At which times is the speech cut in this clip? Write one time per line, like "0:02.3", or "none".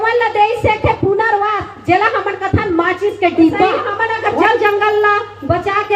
0:03.9